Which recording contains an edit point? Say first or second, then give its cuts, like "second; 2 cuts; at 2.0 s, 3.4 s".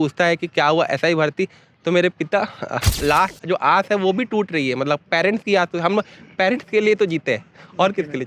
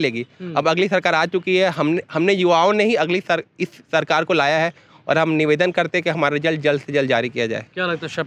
first; 1 cut; at 2.9 s